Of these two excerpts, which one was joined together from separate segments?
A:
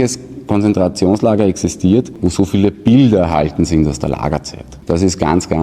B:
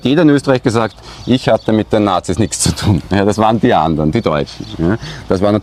A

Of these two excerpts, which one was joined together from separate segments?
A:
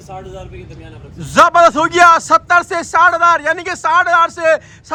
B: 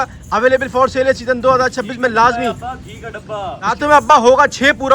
B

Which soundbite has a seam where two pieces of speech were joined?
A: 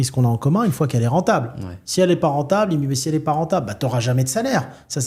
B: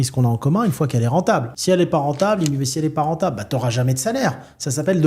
B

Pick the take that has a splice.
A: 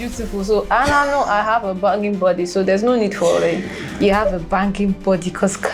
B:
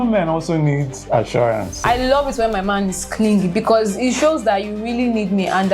B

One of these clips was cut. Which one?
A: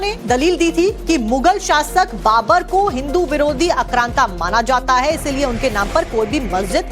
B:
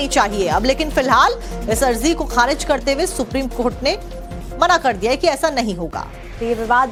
A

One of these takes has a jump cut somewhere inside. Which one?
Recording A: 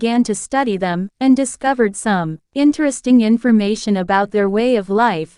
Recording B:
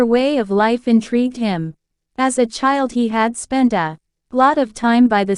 A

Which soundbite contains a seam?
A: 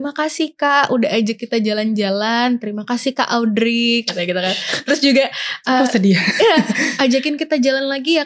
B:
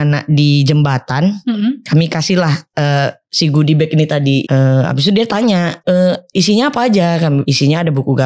B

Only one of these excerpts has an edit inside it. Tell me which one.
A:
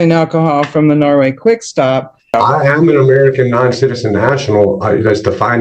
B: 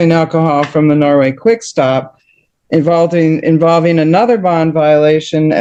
A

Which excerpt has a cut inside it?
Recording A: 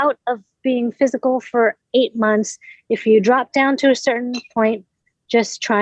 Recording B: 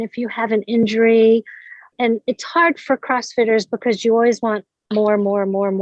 B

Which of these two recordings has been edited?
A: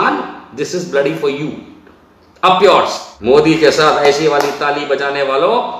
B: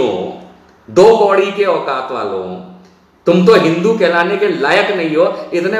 A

